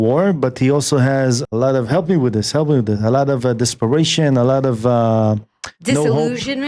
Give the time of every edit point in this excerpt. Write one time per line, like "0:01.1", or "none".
0:01.4